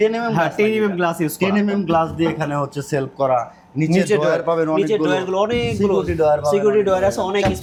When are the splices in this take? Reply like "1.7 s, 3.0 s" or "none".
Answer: none